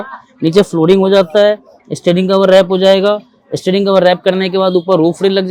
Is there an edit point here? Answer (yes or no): no